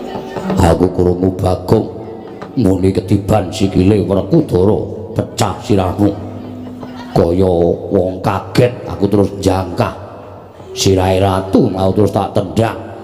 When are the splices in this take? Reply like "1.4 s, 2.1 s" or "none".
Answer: none